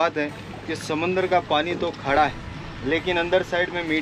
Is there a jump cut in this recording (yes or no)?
no